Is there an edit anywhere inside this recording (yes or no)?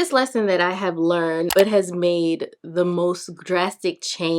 yes